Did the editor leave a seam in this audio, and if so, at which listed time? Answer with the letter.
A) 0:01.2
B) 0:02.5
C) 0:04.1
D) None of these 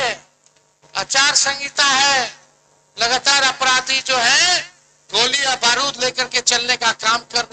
D